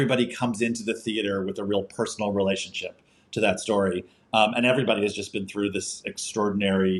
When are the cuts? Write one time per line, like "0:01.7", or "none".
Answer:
none